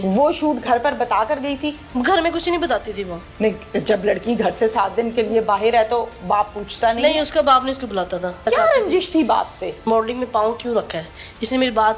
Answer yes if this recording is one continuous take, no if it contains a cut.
no